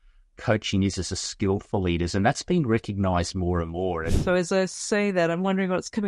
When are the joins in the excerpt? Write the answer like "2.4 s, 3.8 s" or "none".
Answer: 4.1 s